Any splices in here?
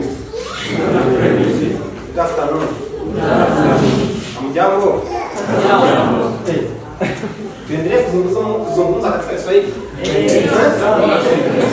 no; 0 cuts

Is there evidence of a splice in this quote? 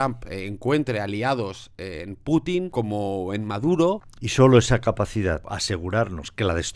yes; 3 cuts; at 2.7 s, 4.2 s, 5.5 s

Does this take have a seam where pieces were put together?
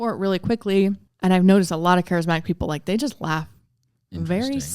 yes; 1 cut; at 1.1 s

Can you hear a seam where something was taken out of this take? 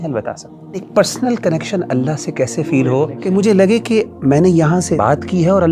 yes; 3 cuts; at 0.9 s, 3.2 s, 5.0 s

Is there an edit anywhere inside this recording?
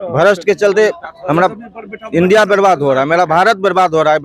no; 0 cuts

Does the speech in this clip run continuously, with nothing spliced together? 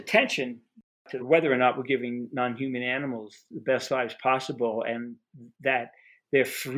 no; 1 cut; at 1.2 s

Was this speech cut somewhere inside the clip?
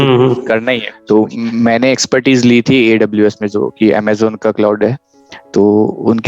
yes; 1 cut; at 0.9 s

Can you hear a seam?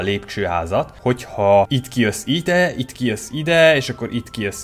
yes; 2 cuts; at 0.9 s, 1.8 s

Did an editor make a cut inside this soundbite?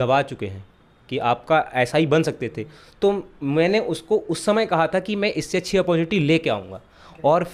no; 0 cuts

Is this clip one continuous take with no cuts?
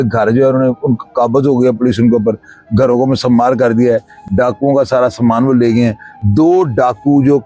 yes; 0 cuts

